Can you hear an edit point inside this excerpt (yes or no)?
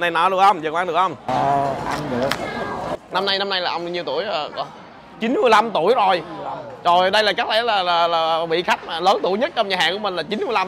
no